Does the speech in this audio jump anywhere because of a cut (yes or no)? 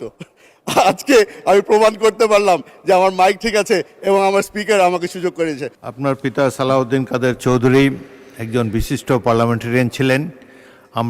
yes